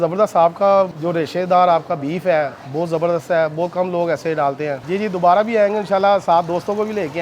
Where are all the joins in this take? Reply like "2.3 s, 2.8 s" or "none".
0.9 s, 2.6 s, 4.8 s